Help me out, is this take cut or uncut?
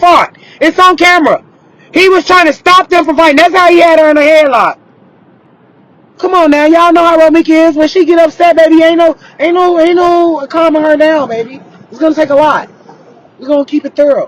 uncut